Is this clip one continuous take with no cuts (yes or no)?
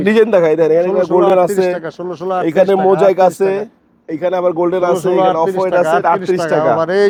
yes